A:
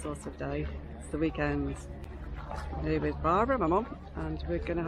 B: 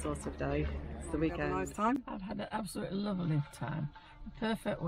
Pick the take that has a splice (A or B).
B